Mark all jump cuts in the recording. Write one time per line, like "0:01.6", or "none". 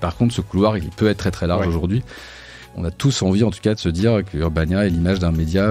0:00.9
0:02.6
0:04.3